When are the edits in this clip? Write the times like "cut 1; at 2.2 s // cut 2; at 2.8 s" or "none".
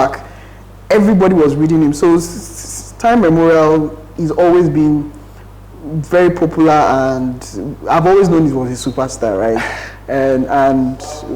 none